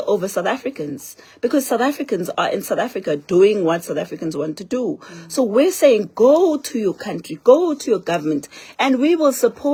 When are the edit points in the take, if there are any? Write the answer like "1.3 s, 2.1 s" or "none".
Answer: none